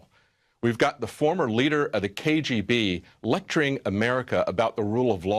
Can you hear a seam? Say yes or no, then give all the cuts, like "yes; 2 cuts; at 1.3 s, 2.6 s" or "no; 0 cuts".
yes; 1 cut; at 2.8 s